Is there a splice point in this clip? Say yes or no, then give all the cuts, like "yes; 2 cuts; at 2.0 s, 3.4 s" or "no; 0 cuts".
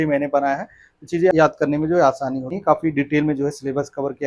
yes; 2 cuts; at 1.3 s, 2.6 s